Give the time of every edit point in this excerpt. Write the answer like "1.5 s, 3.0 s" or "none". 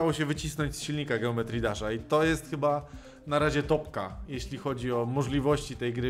none